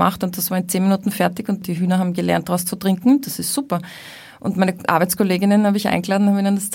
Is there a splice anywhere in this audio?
yes; 1 cut; at 1.6 s

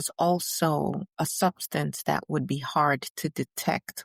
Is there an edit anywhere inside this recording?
no; 0 cuts

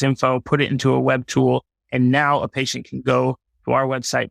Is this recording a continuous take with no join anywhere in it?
yes; 0 cuts

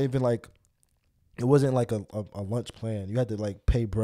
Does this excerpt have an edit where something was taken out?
no; 0 cuts

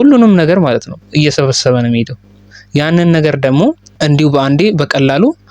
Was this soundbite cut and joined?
yes; 1 cut; at 3.9 s

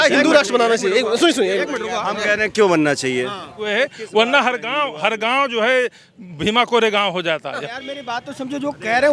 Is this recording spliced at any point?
yes; 2 cuts; at 3.6 s, 7.7 s

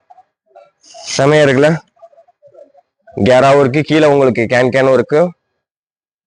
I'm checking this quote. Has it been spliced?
no; 0 cuts

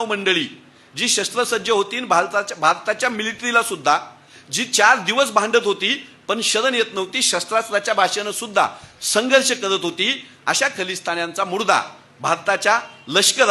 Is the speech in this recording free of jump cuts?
yes; 0 cuts

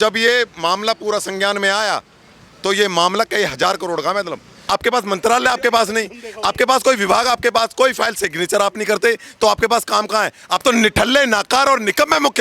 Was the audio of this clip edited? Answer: yes; 1 cut; at 4.6 s

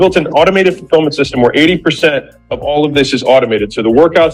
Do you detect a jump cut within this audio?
no; 0 cuts

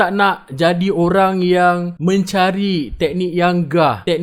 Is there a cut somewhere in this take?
no; 0 cuts

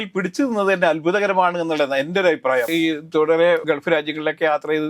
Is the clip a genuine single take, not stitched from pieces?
no; 2 cuts; at 2.7 s, 3.6 s

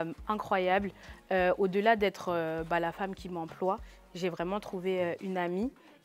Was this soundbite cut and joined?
no; 0 cuts

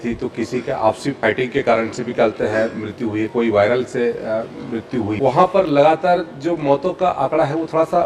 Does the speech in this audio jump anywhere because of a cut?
yes; 2 cuts; at 1.2 s, 5.1 s

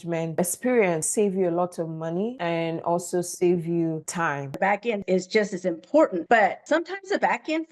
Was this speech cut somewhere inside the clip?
yes; 2 cuts; at 1.1 s, 4.6 s

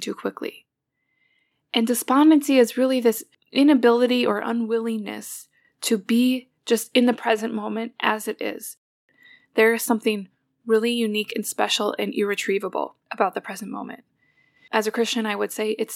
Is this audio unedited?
no; 1 cut; at 9.0 s

